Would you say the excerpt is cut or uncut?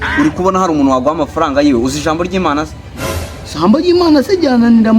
uncut